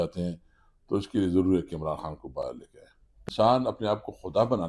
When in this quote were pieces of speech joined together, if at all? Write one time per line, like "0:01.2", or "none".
0:03.2